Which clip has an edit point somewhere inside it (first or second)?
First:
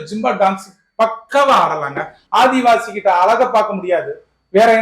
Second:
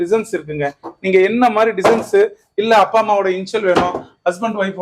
first